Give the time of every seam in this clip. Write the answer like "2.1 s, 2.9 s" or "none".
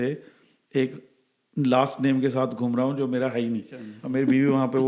4.0 s

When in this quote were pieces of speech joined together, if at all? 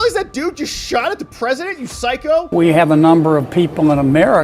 2.5 s

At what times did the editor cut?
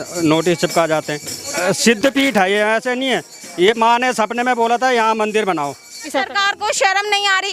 1.5 s, 6.0 s

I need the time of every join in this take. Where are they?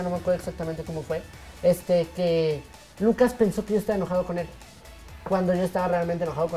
none

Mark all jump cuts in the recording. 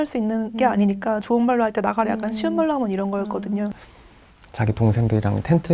3.7 s

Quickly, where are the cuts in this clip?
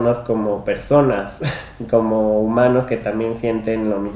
none

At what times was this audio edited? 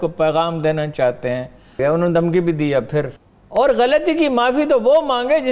1.8 s, 3.4 s

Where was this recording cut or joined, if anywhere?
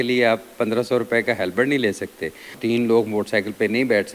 2.6 s

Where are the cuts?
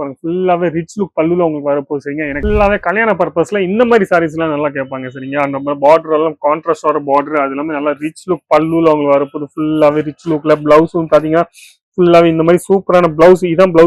2.3 s

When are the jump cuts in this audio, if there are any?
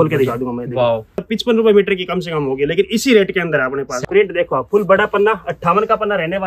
1.2 s, 3.9 s

